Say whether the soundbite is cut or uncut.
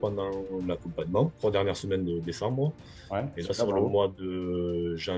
cut